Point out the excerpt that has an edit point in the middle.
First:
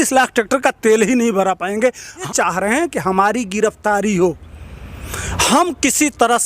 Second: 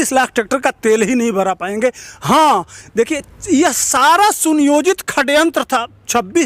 first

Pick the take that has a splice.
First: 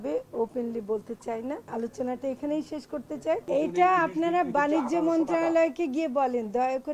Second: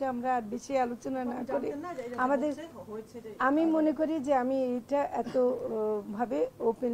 first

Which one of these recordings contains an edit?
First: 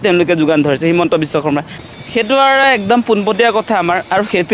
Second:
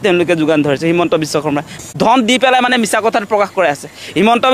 second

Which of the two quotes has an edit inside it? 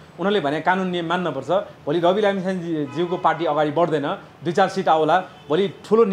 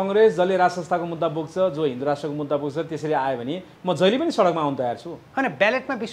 second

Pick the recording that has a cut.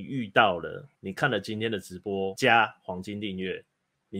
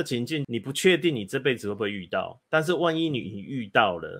first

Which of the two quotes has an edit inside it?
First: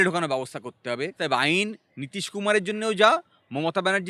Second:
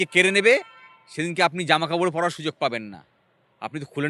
first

